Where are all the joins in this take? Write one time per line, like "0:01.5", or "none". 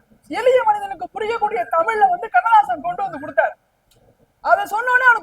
none